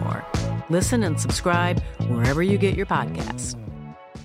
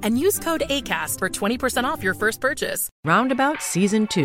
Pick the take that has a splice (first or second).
second